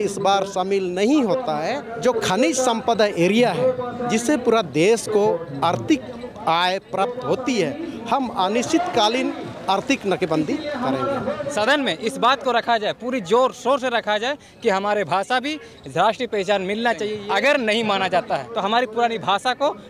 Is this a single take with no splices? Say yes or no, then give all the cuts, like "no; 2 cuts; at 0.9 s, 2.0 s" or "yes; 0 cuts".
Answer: no; 4 cuts; at 1.9 s, 11.4 s, 17.1 s, 18.5 s